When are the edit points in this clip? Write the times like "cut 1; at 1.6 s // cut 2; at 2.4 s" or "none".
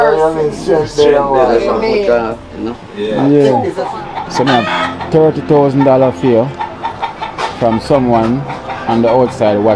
cut 1; at 3.8 s